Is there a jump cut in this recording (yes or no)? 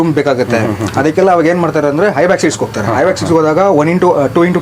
no